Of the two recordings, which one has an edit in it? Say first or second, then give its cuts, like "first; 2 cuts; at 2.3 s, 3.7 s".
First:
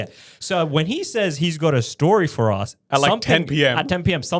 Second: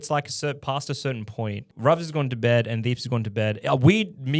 second; 1 cut; at 1.7 s